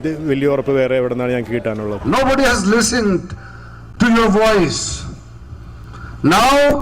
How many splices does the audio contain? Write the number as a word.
one